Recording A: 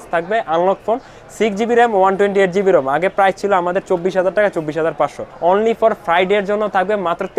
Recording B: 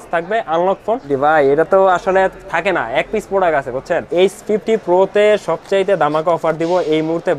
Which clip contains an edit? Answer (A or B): B